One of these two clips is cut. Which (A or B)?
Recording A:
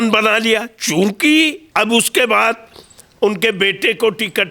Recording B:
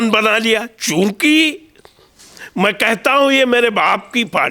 A